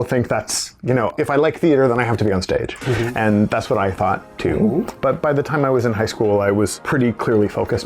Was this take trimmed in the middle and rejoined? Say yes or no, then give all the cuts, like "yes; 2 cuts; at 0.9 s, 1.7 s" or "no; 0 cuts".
yes; 3 cuts; at 1.1 s, 5.0 s, 6.8 s